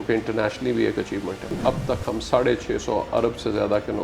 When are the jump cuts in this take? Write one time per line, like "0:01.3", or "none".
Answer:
0:01.5